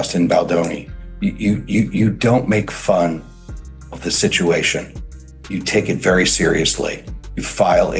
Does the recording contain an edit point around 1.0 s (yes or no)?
no